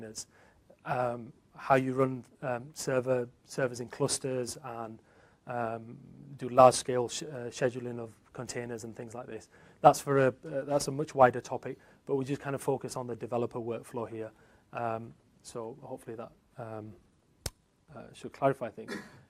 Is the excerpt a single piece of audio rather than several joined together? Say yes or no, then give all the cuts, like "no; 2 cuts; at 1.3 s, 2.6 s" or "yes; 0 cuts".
yes; 0 cuts